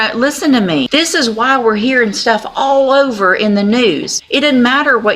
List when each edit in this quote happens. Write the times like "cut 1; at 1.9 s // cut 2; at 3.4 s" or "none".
cut 1; at 0.9 s // cut 2; at 4.1 s

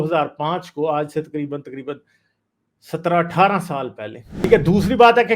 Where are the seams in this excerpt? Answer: cut 1; at 4.5 s

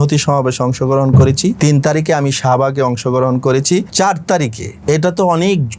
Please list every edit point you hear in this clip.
cut 1; at 1.6 s // cut 2; at 3.9 s // cut 3; at 4.7 s

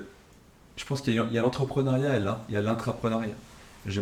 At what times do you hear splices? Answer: none

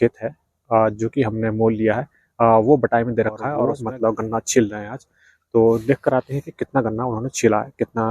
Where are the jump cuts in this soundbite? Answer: cut 1; at 3.6 s

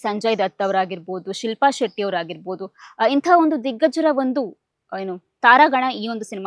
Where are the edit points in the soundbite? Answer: none

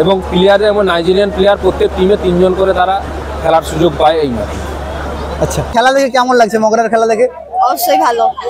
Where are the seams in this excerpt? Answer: cut 1; at 5.7 s

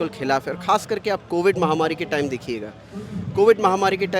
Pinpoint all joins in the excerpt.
none

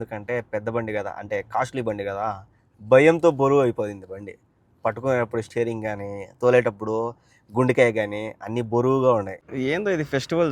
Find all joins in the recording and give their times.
cut 1; at 9.4 s

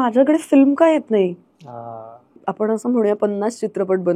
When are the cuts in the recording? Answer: cut 1; at 2.4 s

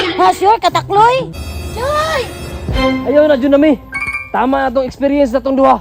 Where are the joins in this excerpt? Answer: cut 1; at 1.4 s

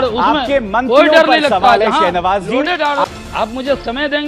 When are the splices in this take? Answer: cut 1; at 3.0 s

